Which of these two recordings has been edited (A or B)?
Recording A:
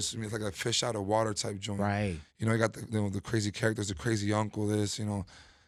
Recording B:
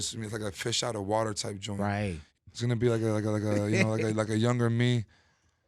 B